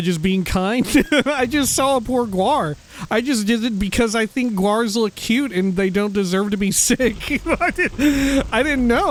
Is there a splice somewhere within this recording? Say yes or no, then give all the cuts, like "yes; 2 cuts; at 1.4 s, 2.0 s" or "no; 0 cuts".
no; 0 cuts